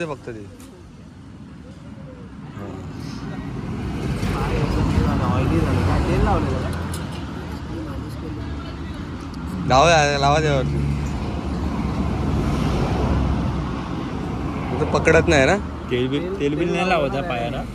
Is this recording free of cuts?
yes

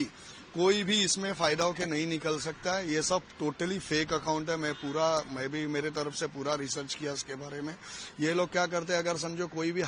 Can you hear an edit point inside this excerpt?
no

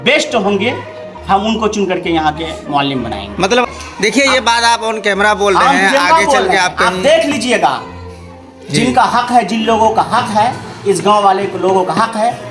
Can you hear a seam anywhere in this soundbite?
yes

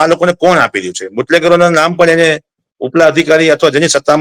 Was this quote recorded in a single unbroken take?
yes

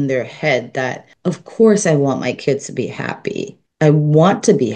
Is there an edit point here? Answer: yes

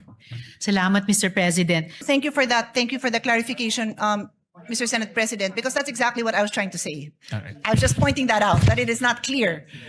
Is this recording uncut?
no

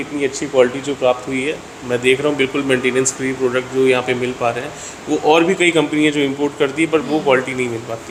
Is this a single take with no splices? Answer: yes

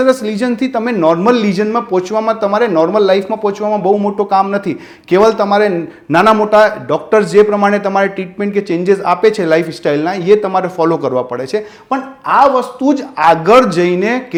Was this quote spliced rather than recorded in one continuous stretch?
no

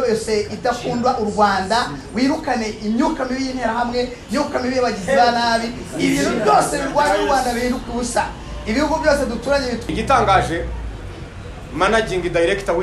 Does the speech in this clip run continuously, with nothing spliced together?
no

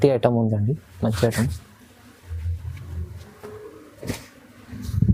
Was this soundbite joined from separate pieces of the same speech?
no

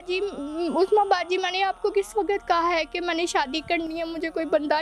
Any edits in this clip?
no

